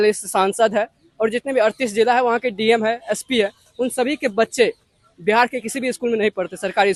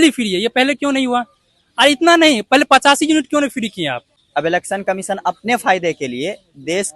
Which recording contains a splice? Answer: second; 1 cut; at 4.1 s

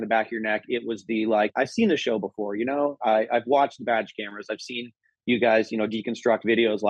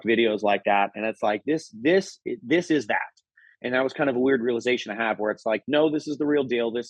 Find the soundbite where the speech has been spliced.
first; 1 cut; at 1.5 s

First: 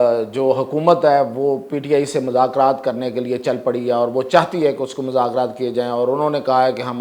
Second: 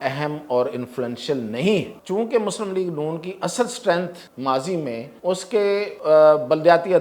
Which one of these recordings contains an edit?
second; 4 cuts; at 2.0 s, 4.2 s, 5.1 s, 5.9 s

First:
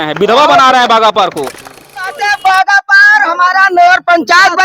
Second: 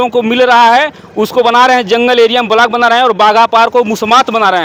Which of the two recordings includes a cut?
first; 1 cut; at 1.9 s

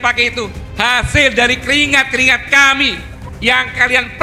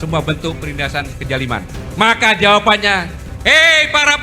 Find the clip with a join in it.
second; 1 cut; at 1.8 s

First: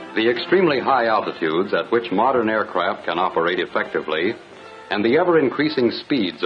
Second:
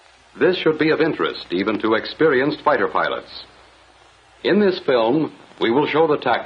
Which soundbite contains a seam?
first; 1 cut; at 4.5 s

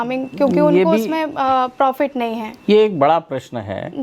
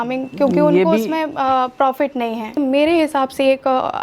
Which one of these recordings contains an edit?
second; 1 cut; at 2.6 s

